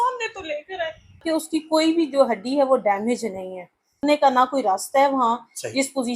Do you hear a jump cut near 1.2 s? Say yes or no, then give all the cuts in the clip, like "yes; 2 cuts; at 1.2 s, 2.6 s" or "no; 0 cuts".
yes; 2 cuts; at 1.2 s, 4.0 s